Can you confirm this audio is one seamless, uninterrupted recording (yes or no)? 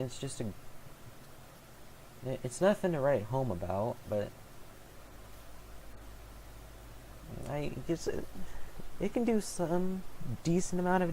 no